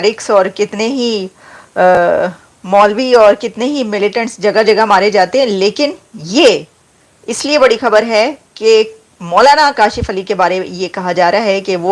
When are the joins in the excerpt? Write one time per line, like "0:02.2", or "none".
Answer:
none